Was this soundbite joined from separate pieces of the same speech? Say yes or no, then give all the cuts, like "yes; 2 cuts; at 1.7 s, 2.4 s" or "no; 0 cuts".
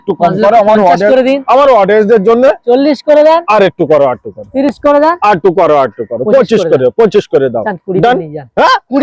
no; 0 cuts